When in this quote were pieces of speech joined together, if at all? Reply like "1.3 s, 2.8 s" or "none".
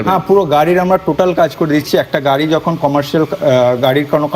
none